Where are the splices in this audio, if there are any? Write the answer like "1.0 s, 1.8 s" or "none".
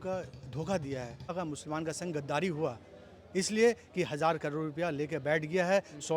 1.3 s